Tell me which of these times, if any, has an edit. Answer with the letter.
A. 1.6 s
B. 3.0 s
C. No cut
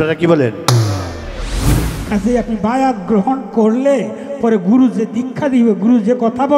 A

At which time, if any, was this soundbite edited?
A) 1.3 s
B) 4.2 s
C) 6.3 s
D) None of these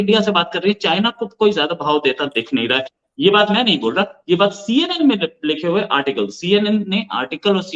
D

